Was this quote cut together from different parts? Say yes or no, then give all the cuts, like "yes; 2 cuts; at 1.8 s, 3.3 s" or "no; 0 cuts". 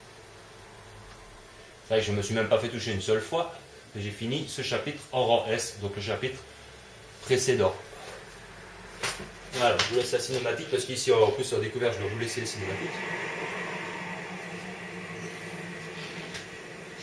no; 0 cuts